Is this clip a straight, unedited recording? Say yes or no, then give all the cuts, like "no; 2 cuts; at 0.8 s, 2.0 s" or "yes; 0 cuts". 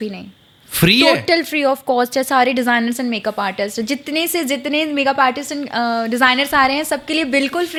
yes; 0 cuts